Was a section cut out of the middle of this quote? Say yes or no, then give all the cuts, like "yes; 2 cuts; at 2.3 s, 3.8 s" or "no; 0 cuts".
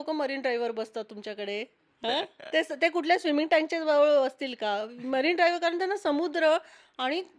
yes; 1 cut; at 1.8 s